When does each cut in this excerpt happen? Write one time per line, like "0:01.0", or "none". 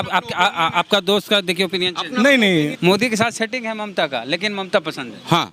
0:02.7

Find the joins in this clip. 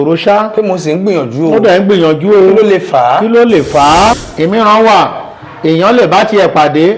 0:04.2

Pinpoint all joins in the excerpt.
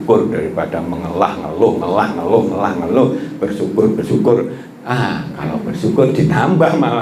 none

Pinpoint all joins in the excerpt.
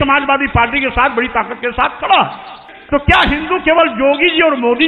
0:02.6

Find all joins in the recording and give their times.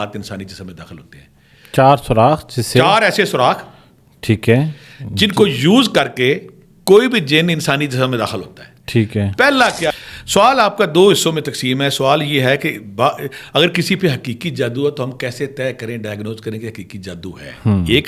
0:09.9

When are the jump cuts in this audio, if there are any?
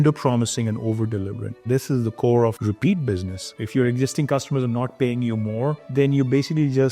0:01.5

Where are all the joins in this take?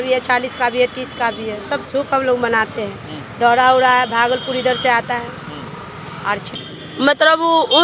0:01.8
0:06.5

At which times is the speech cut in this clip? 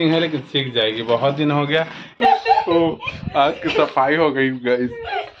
0:02.3

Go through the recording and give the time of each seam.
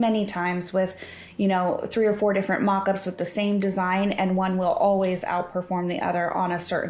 none

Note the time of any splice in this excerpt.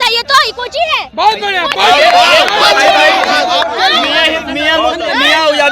none

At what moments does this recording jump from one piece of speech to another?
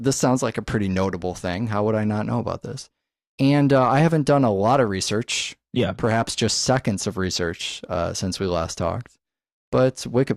0:07.2

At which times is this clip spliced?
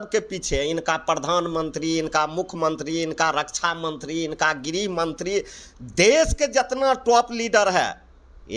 none

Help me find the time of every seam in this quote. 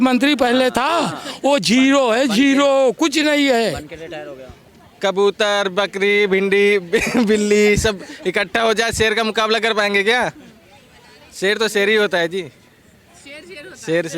0:04.6

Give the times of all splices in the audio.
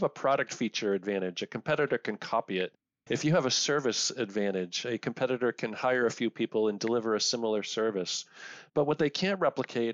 none

